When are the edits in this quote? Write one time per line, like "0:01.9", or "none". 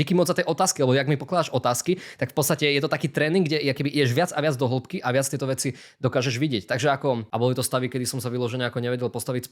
0:07.3

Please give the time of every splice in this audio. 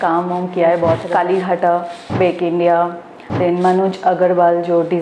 0:01.0

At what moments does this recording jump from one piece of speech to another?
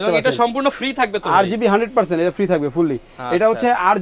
none

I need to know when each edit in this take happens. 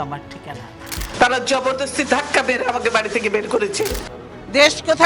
0:01.0
0:04.1

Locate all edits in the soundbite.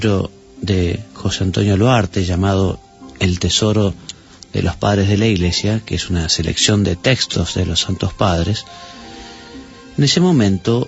0:06.7

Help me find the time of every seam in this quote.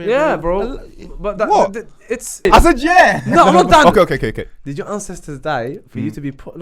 0:02.5

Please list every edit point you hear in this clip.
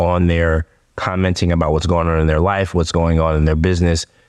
none

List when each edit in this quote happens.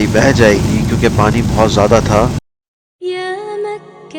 0:02.4

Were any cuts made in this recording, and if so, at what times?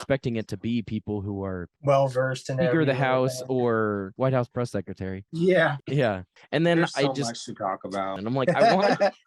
0:04.1
0:05.2
0:05.8
0:08.2

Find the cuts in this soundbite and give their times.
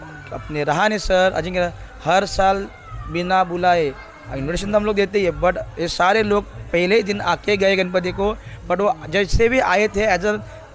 none

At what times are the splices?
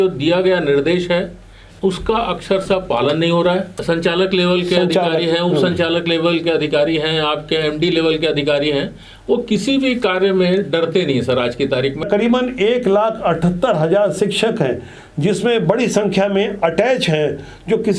0:03.7
0:12.0

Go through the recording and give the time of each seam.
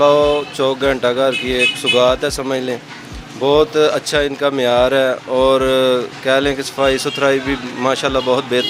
none

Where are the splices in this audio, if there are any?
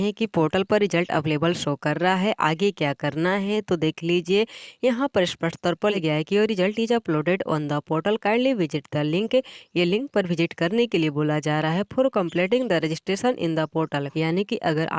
none

